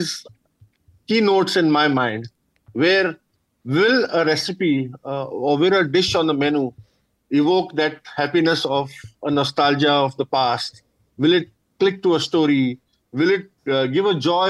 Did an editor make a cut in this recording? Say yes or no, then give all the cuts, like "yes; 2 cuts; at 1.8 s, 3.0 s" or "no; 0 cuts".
yes; 1 cut; at 13.5 s